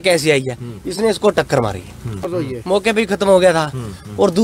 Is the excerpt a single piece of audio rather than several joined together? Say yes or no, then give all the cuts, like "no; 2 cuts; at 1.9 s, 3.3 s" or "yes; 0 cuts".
no; 1 cut; at 2.3 s